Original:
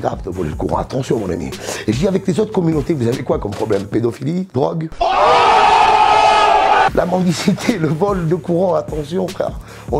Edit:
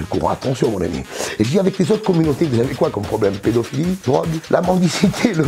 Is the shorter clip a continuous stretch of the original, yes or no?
no